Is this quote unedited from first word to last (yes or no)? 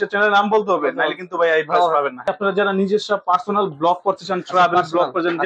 no